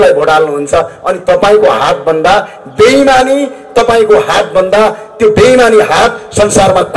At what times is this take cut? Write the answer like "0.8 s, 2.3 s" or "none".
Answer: none